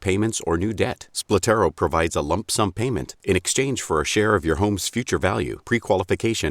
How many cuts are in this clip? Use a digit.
1